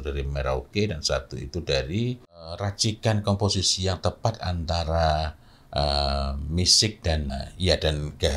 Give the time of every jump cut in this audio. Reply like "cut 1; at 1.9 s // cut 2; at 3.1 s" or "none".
cut 1; at 2.7 s // cut 2; at 7.3 s